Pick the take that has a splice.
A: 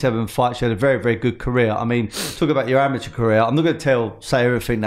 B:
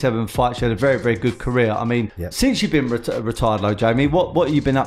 B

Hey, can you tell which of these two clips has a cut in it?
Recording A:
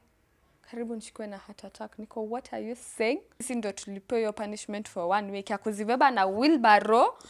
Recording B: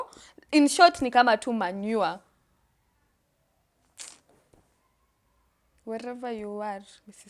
A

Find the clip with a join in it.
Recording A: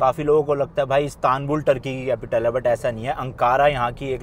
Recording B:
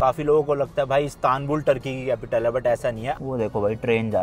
B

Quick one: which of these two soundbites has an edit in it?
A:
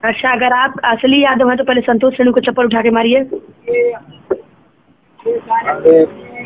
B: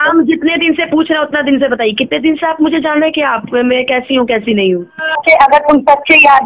B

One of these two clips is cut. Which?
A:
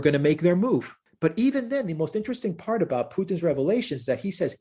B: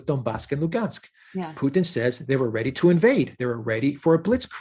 A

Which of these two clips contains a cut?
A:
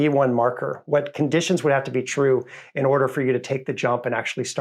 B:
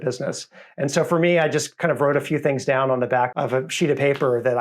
B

